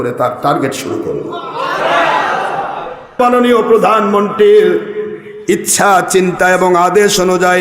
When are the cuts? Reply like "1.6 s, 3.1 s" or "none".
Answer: 3.2 s